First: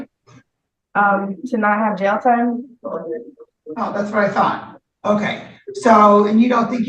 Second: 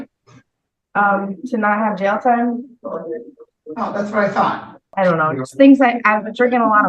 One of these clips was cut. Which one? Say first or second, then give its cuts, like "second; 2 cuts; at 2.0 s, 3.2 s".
second; 1 cut; at 4.8 s